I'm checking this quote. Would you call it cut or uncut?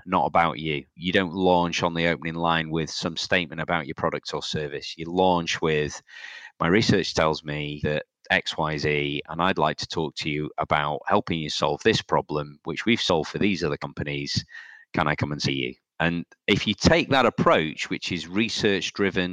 cut